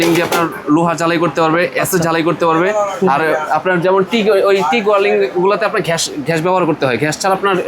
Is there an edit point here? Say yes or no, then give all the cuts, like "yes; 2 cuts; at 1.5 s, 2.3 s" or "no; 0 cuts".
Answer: no; 0 cuts